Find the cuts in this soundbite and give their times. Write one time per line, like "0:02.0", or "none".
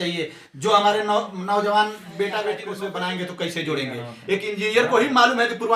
0:02.7